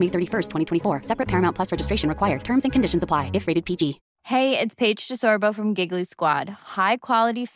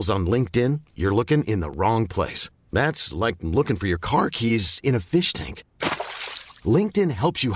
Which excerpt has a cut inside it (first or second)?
first